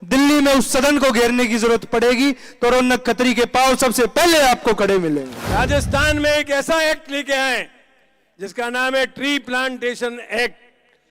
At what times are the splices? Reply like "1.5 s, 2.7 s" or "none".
5.4 s